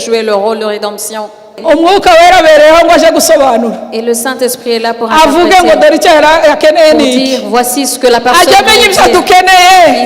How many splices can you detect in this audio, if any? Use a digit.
1